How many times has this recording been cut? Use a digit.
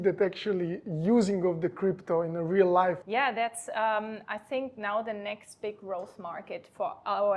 1